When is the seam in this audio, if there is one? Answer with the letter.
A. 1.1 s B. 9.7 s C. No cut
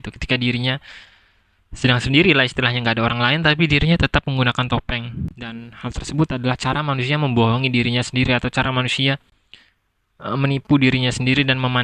C